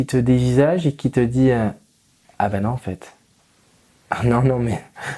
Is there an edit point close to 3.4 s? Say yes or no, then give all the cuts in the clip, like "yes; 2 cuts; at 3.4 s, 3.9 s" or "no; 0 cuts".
no; 0 cuts